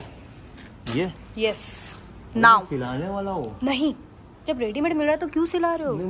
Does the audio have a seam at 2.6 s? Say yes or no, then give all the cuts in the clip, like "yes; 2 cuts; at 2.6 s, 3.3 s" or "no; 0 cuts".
no; 0 cuts